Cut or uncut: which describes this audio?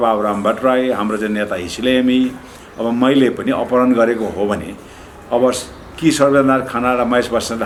uncut